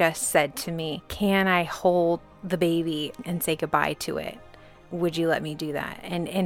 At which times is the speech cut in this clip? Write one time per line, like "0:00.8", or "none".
0:01.0
0:02.3
0:03.2